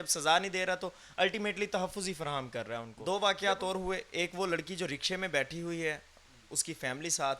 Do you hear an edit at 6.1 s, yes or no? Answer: no